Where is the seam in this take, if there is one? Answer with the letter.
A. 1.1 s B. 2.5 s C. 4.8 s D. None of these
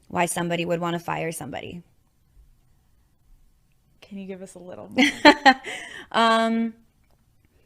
D